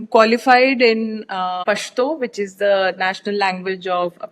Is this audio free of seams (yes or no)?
no